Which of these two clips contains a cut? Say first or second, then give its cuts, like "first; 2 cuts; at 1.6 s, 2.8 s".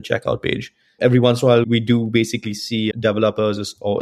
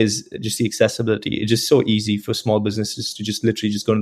first; 3 cuts; at 1.0 s, 1.7 s, 2.9 s